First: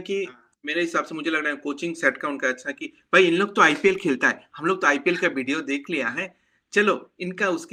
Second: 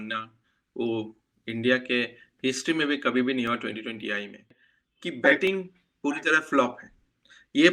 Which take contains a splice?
second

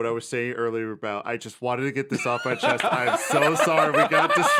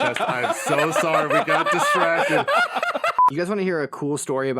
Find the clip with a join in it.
second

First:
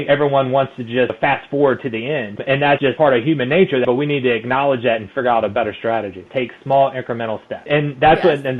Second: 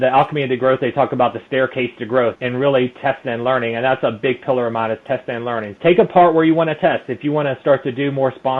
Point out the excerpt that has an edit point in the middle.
first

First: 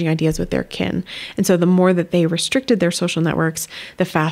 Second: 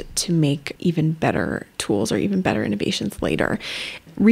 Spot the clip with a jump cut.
second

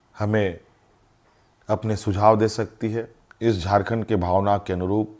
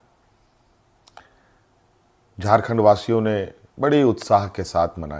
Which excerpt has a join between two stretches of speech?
first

